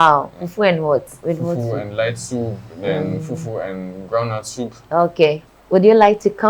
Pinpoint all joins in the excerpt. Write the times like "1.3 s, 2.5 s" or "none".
1.1 s, 5.5 s